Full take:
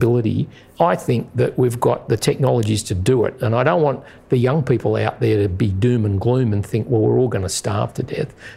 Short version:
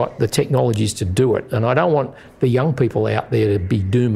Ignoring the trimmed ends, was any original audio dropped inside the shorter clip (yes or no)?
no